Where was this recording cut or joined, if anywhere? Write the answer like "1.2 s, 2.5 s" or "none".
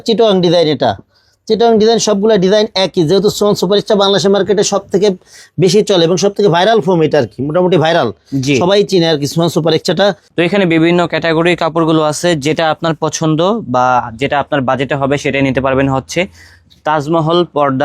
10.2 s